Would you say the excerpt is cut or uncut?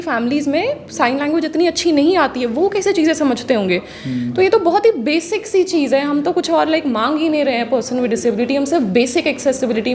uncut